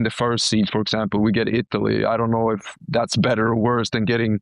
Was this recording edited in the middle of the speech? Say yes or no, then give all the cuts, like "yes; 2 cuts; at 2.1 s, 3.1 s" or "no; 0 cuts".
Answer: no; 0 cuts